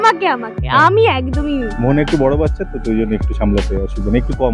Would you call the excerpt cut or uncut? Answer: uncut